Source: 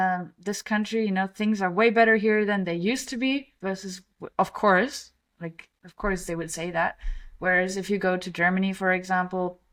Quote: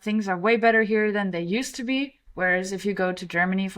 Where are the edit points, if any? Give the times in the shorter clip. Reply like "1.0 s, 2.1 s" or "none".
2.2 s